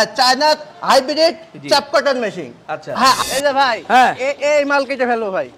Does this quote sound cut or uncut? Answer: cut